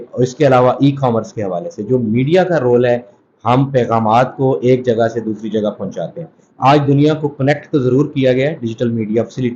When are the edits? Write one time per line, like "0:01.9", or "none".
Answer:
none

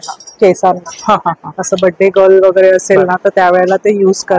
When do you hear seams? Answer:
none

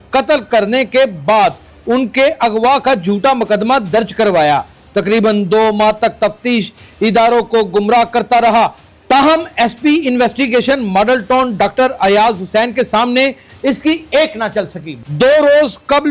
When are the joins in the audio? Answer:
0:15.0

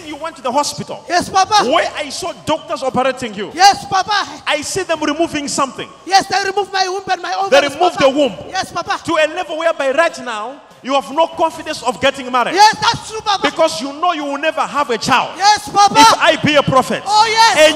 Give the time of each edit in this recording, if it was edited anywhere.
0:16.0

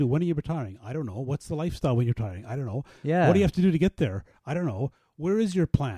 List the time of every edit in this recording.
none

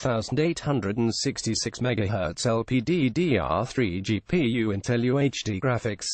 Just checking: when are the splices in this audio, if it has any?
0:01.3
0:03.7

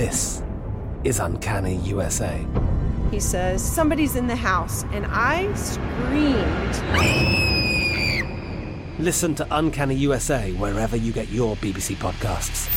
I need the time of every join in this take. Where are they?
none

